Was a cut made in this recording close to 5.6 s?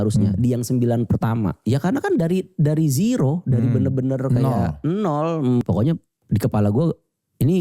yes; 2 cuts; at 1.6 s, 5.6 s

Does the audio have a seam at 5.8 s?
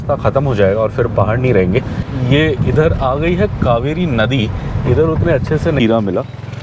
yes; 2 cuts; at 2.0 s, 5.8 s

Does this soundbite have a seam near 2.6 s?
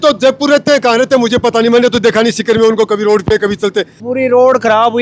no; 1 cut; at 4.0 s

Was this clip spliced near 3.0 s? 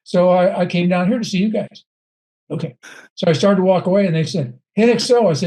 no; 0 cuts

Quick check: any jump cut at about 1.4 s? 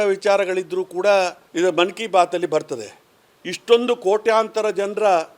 yes; 1 cut; at 1.4 s

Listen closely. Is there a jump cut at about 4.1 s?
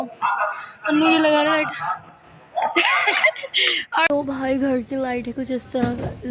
yes; 1 cut; at 4.1 s

